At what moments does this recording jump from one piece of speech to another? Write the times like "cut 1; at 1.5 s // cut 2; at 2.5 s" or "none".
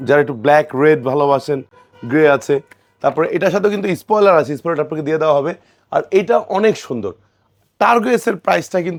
none